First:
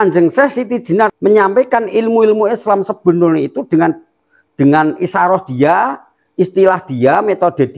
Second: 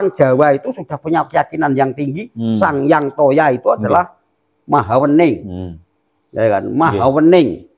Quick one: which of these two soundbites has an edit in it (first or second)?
first